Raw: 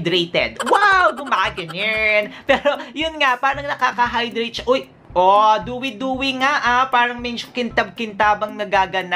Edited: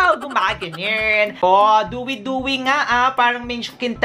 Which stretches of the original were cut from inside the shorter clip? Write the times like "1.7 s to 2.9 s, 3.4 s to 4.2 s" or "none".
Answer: 2.3 s to 5.1 s